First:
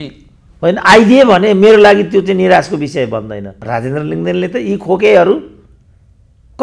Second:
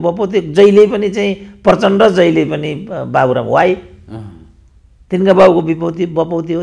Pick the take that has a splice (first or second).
first